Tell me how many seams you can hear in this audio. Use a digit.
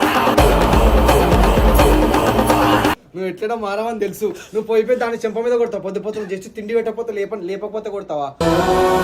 1